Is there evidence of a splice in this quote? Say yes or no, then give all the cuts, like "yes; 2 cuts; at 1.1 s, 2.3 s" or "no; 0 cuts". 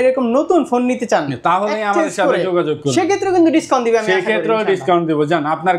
no; 0 cuts